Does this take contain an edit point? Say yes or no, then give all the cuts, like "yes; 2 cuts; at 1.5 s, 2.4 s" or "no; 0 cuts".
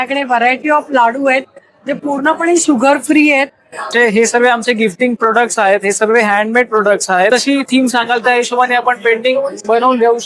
yes; 2 cuts; at 3.9 s, 7.3 s